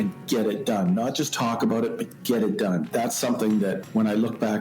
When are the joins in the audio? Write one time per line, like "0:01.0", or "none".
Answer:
0:02.9